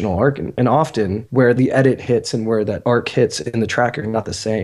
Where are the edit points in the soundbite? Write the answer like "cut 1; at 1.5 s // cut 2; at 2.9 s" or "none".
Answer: cut 1; at 1.4 s // cut 2; at 2.8 s